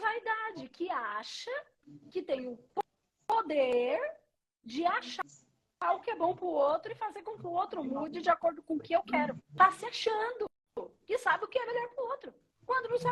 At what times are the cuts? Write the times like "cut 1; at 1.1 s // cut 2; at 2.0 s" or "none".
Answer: cut 1; at 9.4 s